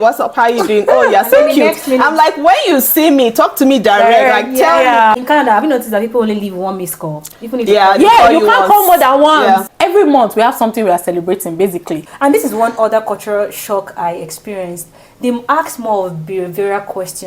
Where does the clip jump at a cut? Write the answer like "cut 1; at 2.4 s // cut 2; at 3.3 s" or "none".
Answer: cut 1; at 5.1 s // cut 2; at 9.7 s // cut 3; at 12.0 s